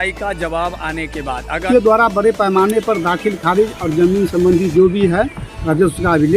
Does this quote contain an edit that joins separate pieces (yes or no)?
yes